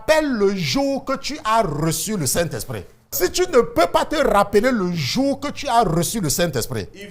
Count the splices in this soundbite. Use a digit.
1